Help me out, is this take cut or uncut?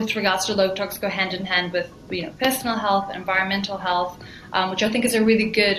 uncut